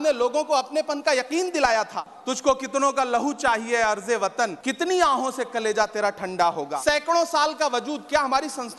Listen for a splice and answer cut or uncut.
cut